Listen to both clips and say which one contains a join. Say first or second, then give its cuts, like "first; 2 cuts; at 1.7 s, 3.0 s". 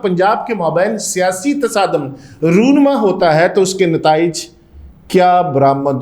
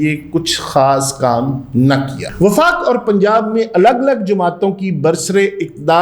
second; 1 cut; at 2.2 s